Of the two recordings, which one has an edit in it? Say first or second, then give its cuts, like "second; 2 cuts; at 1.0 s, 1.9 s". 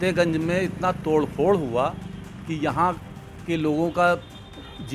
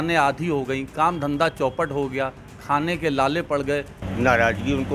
second; 1 cut; at 4.0 s